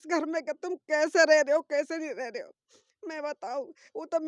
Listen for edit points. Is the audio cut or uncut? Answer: uncut